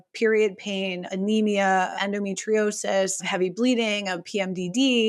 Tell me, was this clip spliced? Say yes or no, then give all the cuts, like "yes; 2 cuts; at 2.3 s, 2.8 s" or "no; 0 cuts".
yes; 3 cuts; at 1.1 s, 1.9 s, 3.3 s